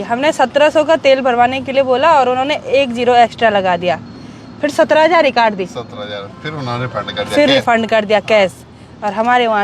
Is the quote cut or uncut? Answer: uncut